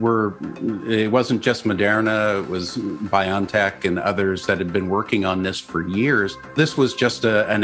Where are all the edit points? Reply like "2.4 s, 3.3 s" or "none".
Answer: 6.5 s